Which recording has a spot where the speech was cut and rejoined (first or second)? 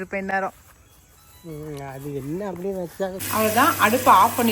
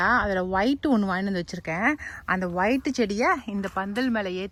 first